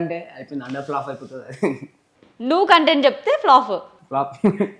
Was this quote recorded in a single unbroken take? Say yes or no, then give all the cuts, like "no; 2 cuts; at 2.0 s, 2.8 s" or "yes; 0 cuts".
yes; 0 cuts